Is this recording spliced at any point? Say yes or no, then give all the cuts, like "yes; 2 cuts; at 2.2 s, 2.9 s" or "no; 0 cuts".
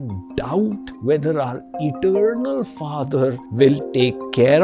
yes; 2 cuts; at 0.9 s, 3.4 s